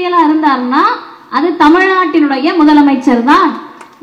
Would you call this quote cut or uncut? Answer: uncut